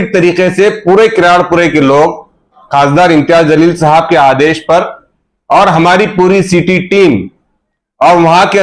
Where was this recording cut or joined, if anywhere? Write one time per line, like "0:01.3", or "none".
0:02.6